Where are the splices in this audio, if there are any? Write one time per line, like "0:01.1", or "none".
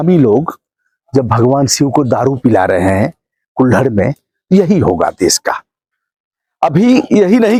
none